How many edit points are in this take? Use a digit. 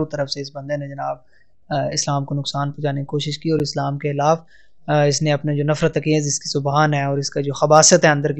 0